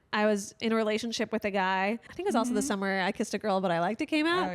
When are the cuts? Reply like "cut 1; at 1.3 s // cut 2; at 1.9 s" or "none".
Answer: cut 1; at 2.1 s